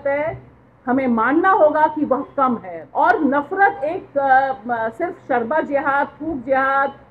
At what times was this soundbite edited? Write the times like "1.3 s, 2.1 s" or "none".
2.8 s